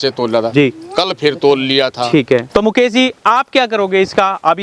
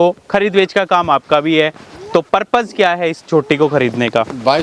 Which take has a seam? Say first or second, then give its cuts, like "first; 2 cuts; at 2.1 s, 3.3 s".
first; 1 cut; at 2.5 s